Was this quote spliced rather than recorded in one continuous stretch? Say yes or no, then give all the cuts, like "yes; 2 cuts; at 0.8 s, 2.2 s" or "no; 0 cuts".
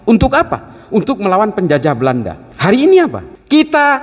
yes; 1 cut; at 2.5 s